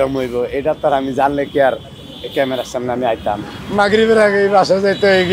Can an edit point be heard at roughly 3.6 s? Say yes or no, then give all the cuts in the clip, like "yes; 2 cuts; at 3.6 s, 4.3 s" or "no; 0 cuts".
yes; 1 cut; at 3.6 s